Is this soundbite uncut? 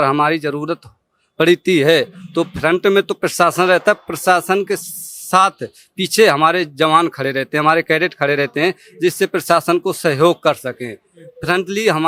yes; 0 cuts

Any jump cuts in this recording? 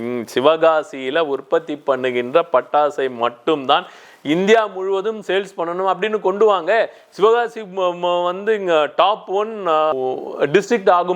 no; 0 cuts

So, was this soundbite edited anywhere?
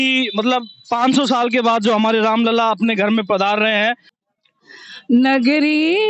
yes; 1 cut; at 4.1 s

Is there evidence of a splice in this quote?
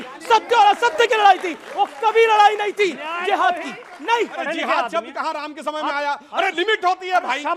yes; 1 cut; at 4.4 s

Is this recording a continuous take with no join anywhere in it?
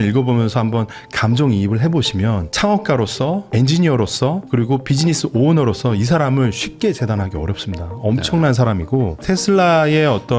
no; 1 cut; at 9.2 s

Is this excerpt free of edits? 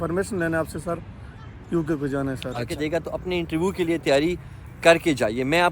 no; 1 cut; at 2.7 s

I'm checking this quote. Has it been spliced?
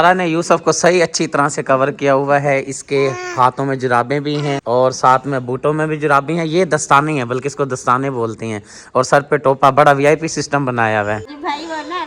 no; 0 cuts

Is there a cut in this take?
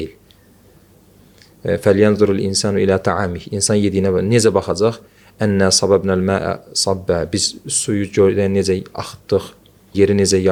no; 0 cuts

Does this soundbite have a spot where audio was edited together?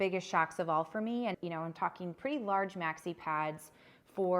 yes; 1 cut; at 1.4 s

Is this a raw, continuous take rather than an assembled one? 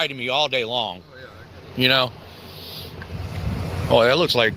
yes; 0 cuts

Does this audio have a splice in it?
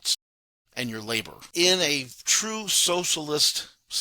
yes; 1 cut; at 1.4 s

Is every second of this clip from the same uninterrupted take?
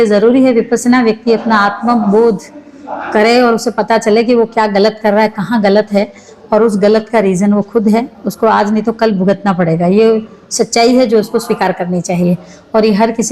yes; 0 cuts

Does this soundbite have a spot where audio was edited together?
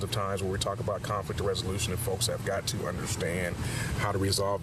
yes; 1 cut; at 1.6 s

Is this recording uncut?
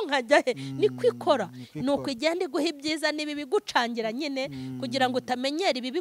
yes; 0 cuts

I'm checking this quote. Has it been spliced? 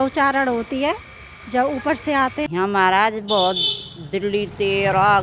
yes; 1 cut; at 2.4 s

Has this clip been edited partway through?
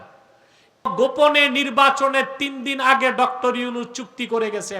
yes; 1 cut; at 0.9 s

